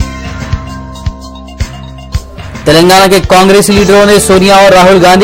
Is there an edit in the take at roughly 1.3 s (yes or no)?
yes